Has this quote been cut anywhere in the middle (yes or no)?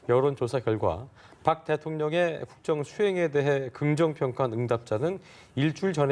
yes